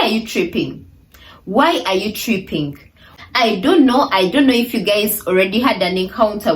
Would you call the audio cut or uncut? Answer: cut